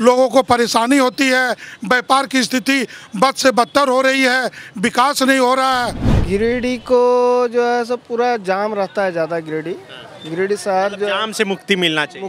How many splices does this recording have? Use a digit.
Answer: 1